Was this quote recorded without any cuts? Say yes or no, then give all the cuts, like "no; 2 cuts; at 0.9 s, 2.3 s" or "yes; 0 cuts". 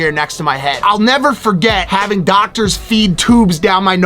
no; 2 cuts; at 0.8 s, 1.8 s